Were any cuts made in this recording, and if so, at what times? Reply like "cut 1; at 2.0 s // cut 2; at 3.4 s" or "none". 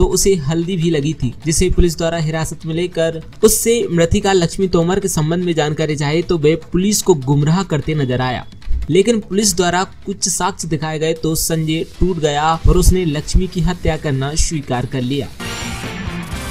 cut 1; at 15.3 s